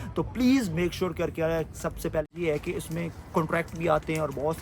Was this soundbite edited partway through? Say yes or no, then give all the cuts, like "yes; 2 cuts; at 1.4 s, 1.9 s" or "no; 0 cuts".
yes; 1 cut; at 2.2 s